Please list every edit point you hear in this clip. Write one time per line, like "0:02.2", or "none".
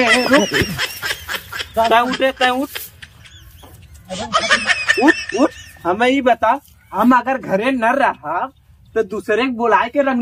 0:06.8